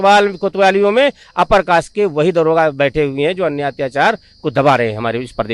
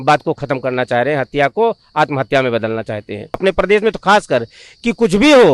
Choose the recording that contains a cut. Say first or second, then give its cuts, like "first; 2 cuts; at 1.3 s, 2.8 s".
second; 1 cut; at 3.4 s